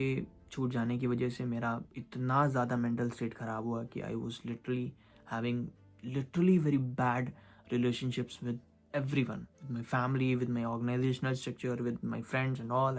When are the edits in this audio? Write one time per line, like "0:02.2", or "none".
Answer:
none